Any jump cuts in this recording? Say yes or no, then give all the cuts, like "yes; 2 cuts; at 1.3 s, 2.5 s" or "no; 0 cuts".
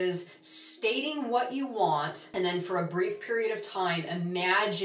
yes; 1 cut; at 2.2 s